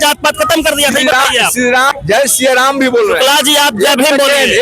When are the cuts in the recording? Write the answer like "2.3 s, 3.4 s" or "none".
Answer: 1.9 s